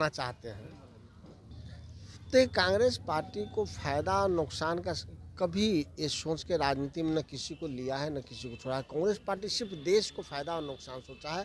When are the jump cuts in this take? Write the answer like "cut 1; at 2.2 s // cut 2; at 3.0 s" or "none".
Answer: cut 1; at 1.6 s

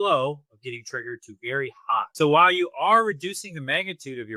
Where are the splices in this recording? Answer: none

